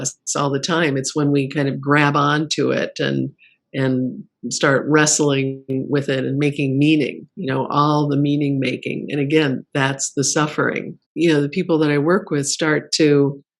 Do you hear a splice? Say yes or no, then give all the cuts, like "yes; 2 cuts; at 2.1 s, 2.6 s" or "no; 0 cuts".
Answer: yes; 1 cut; at 11.0 s